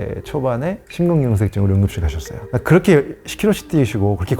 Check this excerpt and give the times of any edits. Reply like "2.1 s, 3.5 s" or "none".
0.8 s, 2.3 s